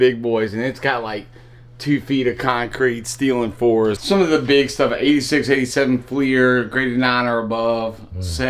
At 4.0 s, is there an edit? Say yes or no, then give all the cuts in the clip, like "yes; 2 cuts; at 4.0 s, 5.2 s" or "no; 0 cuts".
yes; 1 cut; at 4.0 s